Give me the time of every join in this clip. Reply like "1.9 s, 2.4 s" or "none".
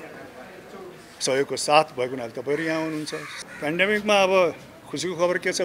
3.3 s